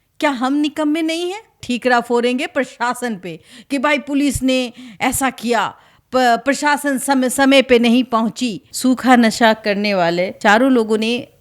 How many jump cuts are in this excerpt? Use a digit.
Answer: 3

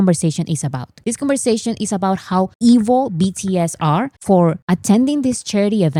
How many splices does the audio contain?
0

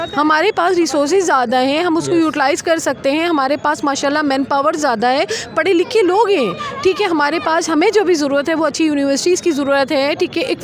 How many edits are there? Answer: 0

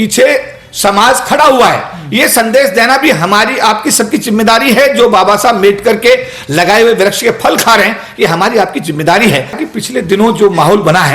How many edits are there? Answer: 1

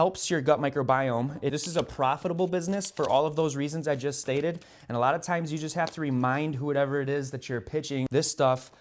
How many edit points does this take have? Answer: 2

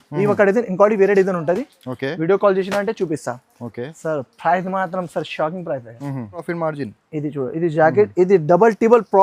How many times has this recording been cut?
1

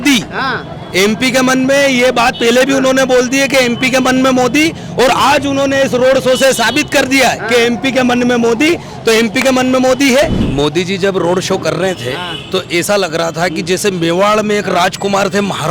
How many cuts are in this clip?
1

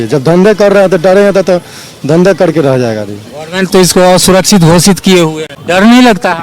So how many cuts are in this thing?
1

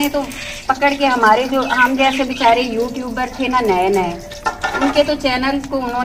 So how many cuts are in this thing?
0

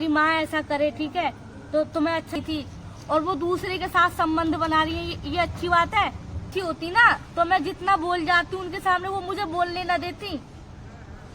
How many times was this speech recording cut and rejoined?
2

